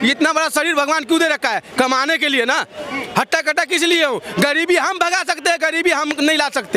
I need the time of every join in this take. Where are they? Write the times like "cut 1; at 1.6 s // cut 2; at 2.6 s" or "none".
none